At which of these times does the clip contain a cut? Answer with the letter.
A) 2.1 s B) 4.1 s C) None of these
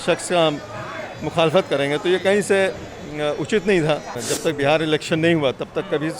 B